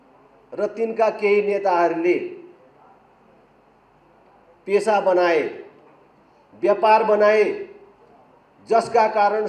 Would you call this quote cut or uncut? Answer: uncut